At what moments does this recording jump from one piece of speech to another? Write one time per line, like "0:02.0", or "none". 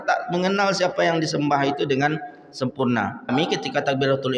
0:03.3